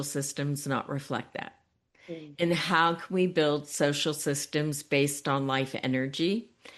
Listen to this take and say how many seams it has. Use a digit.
0